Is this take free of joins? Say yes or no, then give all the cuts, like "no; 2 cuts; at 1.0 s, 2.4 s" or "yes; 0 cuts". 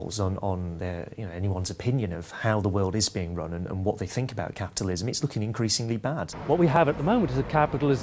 no; 1 cut; at 6.8 s